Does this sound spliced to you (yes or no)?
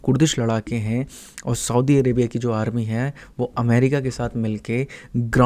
no